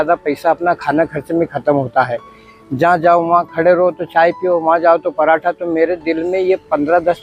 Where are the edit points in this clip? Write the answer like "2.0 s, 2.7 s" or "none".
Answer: none